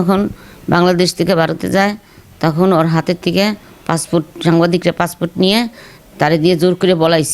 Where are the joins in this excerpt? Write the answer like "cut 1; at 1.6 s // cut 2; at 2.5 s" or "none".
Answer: none